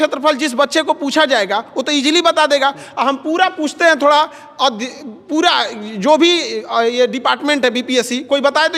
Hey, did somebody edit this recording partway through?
no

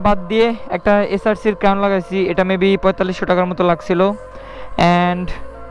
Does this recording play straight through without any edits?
yes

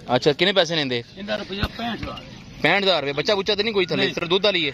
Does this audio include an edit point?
no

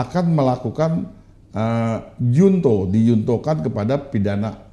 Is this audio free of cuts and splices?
yes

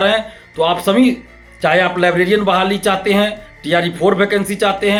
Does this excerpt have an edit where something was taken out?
no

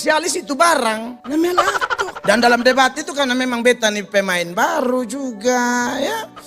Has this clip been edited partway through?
no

